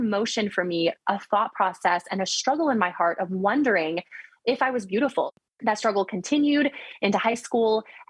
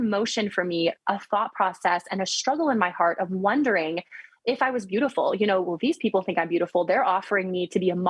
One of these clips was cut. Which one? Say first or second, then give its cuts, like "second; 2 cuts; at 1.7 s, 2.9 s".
first; 1 cut; at 5.3 s